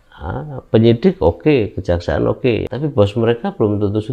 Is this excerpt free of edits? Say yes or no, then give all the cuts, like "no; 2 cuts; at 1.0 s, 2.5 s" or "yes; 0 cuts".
no; 1 cut; at 2.6 s